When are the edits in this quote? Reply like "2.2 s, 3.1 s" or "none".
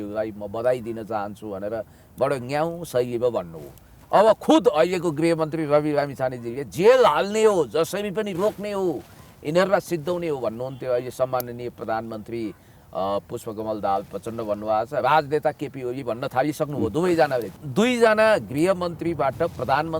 17.5 s